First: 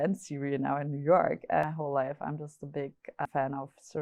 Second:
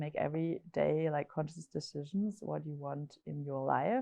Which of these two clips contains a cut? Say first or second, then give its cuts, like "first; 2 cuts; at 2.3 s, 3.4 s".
first; 2 cuts; at 1.6 s, 3.2 s